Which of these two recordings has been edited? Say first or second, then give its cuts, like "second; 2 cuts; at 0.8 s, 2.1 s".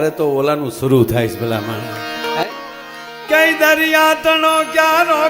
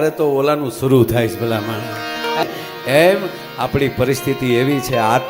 second; 1 cut; at 2.4 s